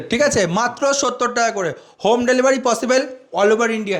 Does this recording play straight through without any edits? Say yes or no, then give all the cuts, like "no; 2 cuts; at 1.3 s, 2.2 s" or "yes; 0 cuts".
yes; 0 cuts